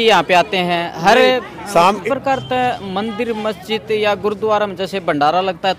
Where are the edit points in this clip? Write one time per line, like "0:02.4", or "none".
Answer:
0:02.0